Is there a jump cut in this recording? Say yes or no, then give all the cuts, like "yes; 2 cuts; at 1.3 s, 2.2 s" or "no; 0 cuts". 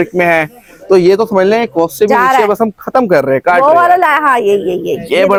no; 0 cuts